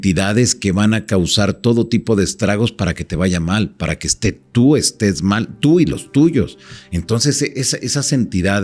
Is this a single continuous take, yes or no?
yes